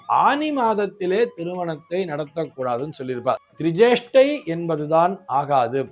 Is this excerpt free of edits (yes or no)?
no